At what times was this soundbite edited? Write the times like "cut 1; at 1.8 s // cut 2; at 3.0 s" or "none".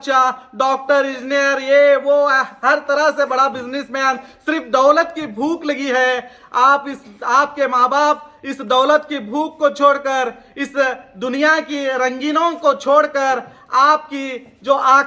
none